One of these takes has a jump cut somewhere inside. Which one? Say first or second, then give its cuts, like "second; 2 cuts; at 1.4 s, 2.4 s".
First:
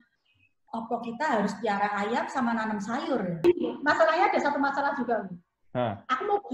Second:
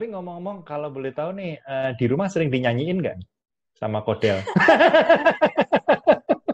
first; 1 cut; at 3.4 s